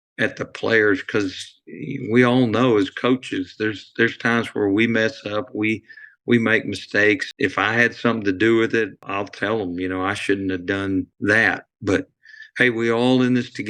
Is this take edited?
yes; 3 cuts; at 7.3 s, 9.0 s, 11.1 s

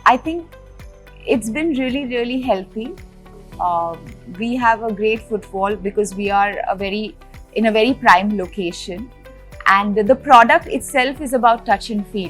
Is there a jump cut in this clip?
no; 0 cuts

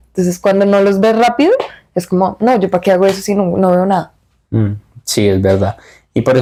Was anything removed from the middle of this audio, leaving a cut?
no; 0 cuts

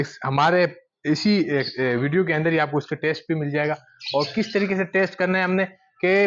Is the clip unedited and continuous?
yes; 0 cuts

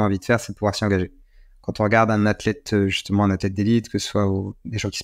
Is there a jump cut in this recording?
no; 0 cuts

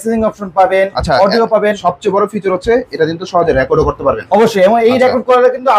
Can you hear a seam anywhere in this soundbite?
no; 0 cuts

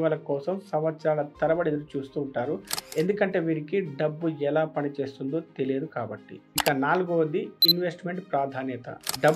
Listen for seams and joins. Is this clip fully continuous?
yes; 0 cuts

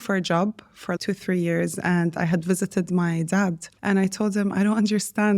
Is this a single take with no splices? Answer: no; 2 cuts; at 1.0 s, 3.7 s

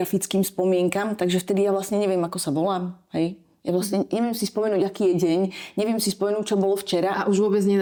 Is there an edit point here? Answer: no; 0 cuts

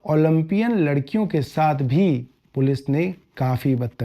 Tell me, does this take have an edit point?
yes; 1 cut; at 2.4 s

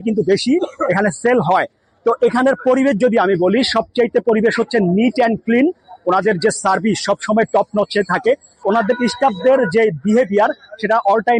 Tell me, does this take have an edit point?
no; 0 cuts

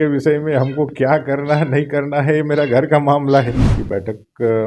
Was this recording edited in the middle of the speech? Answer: yes; 1 cut; at 3.7 s

